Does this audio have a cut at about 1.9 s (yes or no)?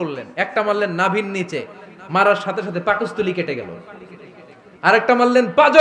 no